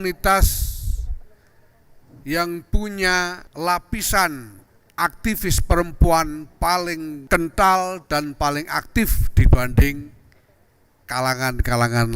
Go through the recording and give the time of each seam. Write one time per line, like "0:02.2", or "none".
0:03.4
0:07.1